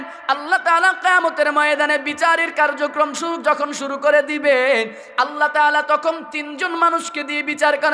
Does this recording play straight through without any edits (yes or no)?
yes